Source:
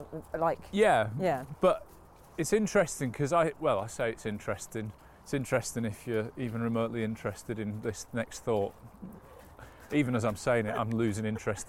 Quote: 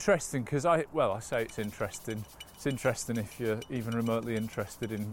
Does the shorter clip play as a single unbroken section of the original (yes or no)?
yes